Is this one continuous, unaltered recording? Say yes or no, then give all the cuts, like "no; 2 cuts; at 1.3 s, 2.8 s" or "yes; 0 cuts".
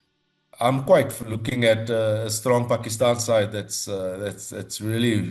yes; 0 cuts